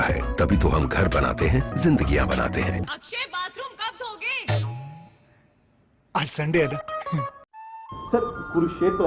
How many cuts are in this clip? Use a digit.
1